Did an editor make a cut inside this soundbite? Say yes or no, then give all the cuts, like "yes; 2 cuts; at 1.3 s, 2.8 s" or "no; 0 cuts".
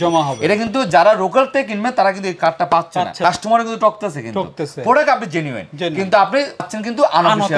no; 0 cuts